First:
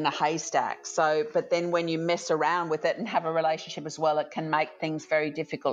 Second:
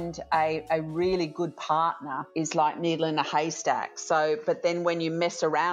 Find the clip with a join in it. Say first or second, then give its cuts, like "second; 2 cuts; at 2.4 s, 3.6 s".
second; 1 cut; at 2.2 s